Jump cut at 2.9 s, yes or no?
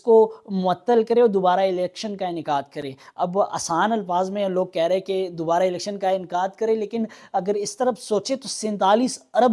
no